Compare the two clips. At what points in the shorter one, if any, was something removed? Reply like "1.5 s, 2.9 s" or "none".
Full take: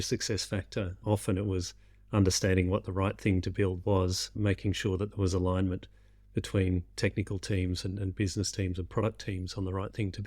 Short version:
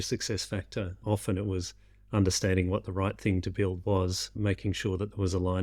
none